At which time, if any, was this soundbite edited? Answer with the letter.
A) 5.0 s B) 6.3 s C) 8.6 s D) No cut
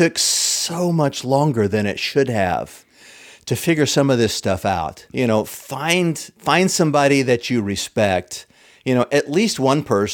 A